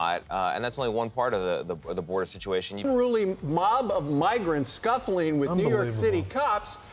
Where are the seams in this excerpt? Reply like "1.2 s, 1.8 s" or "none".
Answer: 2.8 s